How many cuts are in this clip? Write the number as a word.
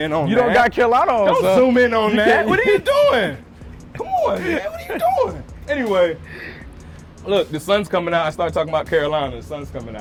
zero